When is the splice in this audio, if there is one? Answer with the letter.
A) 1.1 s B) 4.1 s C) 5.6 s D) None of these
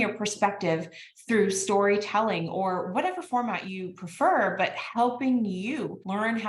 D